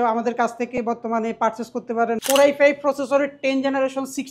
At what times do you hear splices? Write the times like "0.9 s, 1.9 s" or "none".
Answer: 2.2 s